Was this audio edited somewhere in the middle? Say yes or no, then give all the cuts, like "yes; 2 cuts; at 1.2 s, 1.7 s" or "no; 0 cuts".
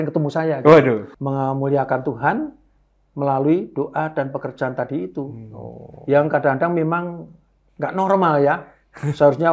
yes; 1 cut; at 1.1 s